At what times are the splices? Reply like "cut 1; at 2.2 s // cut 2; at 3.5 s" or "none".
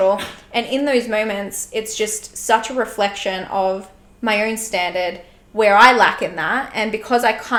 none